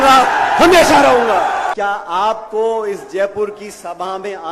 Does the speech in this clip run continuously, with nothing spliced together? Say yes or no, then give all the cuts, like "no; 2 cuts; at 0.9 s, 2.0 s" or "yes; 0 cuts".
no; 1 cut; at 1.7 s